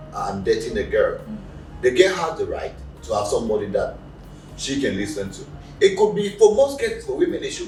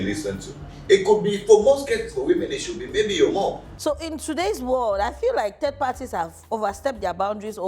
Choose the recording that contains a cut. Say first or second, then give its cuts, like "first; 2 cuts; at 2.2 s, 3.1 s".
second; 1 cut; at 3.7 s